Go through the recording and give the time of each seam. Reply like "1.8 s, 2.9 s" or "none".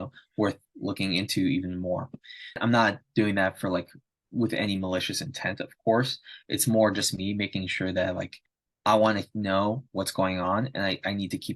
2.6 s

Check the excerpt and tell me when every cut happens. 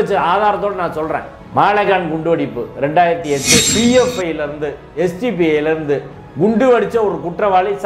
3.7 s

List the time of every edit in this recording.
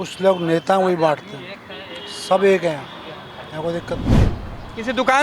4.1 s

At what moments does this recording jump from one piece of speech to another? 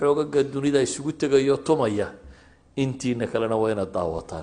none

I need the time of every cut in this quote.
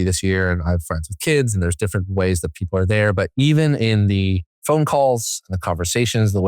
4.5 s

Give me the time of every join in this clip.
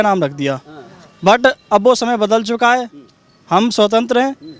none

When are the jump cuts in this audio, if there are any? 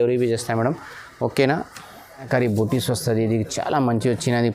2.3 s

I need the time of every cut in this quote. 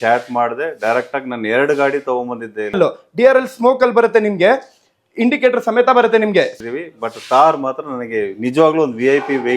2.8 s, 6.5 s

